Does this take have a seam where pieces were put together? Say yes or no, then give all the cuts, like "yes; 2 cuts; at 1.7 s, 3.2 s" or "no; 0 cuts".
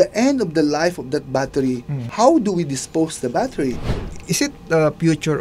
yes; 2 cuts; at 2.0 s, 3.8 s